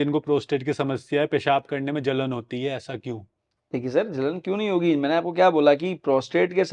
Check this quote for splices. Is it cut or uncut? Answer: uncut